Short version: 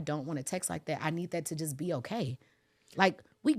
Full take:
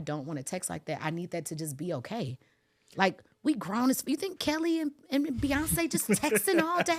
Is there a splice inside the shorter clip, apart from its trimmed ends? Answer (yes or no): no